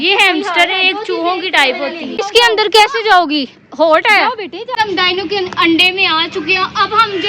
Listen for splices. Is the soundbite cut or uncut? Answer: cut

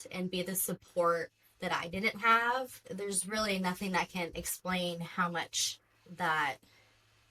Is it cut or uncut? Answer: uncut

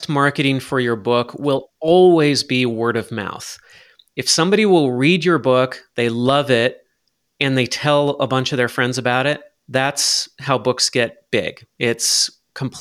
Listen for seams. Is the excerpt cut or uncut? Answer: uncut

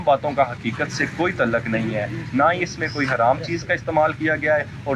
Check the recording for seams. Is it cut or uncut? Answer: uncut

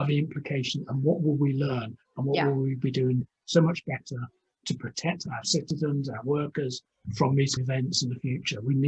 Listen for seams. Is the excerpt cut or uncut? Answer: cut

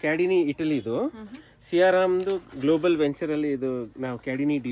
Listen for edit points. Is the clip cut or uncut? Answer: uncut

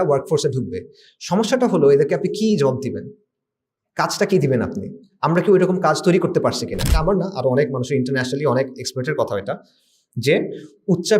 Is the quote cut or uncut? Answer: cut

